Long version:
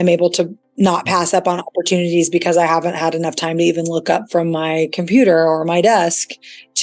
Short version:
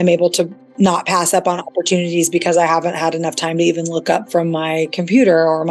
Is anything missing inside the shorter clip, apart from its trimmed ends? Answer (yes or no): no